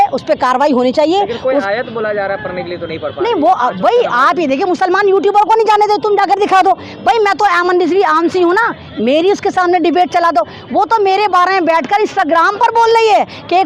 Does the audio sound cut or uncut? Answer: uncut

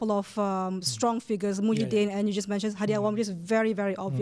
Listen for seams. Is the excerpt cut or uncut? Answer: uncut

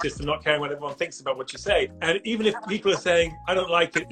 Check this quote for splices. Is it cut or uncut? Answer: cut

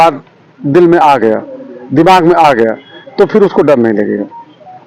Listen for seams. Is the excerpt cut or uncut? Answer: uncut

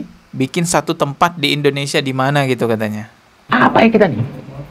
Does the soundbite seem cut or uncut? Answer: uncut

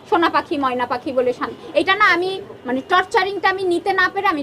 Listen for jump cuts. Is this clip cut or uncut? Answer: uncut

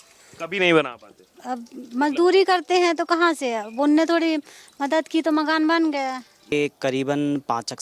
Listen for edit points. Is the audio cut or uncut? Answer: cut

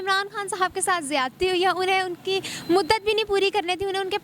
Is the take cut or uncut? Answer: uncut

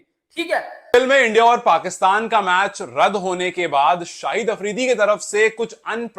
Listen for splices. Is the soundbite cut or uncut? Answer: cut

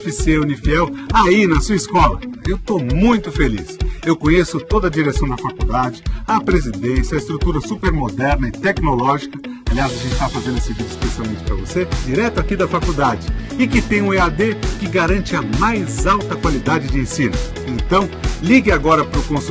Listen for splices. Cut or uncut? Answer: uncut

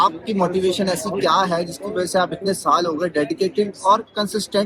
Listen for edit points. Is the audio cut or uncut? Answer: uncut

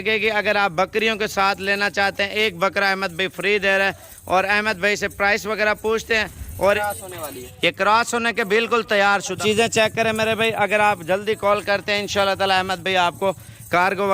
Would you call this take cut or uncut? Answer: cut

